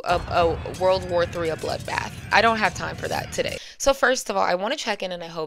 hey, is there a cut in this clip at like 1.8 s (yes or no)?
no